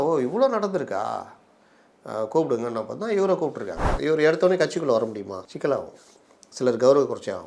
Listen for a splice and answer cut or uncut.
cut